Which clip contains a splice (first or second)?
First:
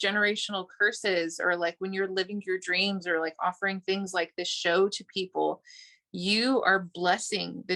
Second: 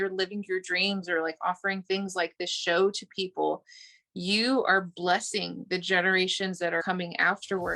second